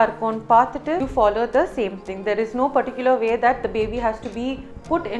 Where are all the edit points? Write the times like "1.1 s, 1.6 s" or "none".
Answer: 1.1 s